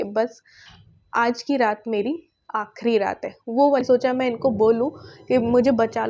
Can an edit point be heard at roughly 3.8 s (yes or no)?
yes